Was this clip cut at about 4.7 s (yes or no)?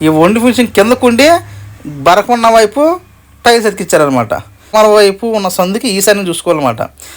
yes